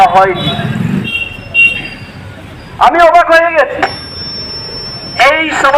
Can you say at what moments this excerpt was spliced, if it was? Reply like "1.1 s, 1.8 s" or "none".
1.0 s

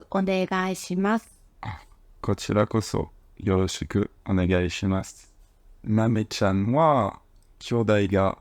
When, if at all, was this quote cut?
1.5 s, 5.3 s

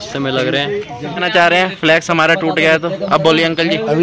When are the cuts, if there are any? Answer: 1.1 s

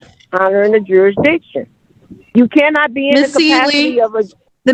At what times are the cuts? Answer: none

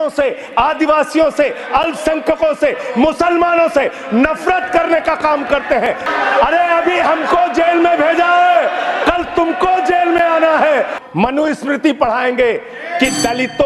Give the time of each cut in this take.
6.0 s, 11.0 s

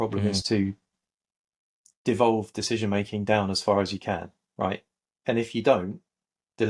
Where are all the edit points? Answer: none

